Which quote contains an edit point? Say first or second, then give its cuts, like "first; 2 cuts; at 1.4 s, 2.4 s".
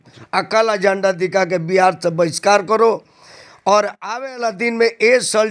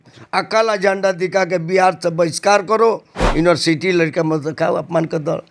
second; 1 cut; at 3.1 s